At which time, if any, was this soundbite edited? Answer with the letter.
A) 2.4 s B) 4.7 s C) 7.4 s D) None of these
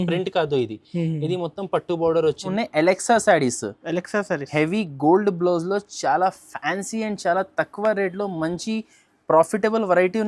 A